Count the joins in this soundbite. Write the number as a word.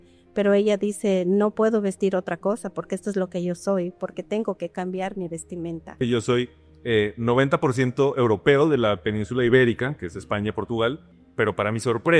two